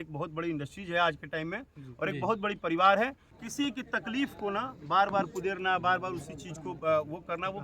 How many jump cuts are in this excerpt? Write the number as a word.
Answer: one